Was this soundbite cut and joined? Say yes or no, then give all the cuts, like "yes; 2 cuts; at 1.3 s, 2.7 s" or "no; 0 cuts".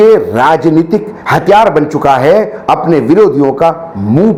no; 0 cuts